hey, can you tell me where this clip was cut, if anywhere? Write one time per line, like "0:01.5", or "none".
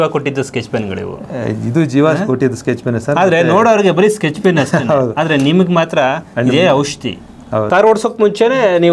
0:07.7